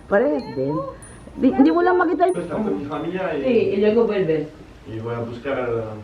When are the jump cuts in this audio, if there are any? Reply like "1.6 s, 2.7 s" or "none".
2.3 s